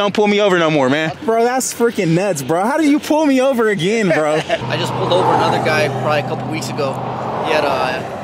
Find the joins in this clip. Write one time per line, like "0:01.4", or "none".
0:01.1
0:04.7

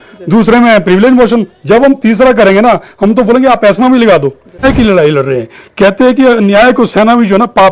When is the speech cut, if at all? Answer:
0:04.6

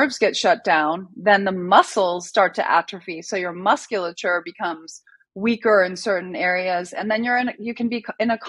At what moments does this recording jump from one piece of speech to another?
none

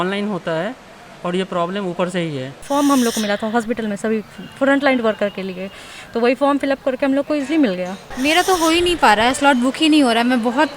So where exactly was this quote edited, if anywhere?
0:02.6
0:08.0

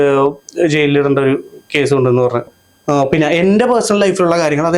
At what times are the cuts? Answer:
0:02.5

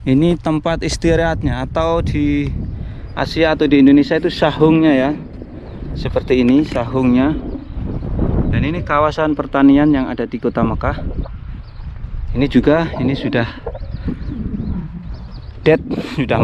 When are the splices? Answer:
none

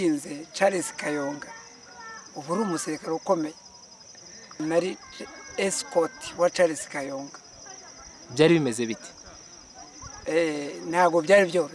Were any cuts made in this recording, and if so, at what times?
0:04.5

